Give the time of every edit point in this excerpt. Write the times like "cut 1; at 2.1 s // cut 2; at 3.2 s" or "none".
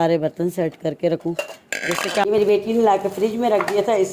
cut 1; at 2.2 s